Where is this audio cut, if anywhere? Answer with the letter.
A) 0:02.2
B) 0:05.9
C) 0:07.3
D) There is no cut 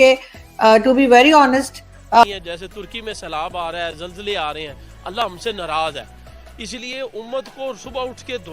A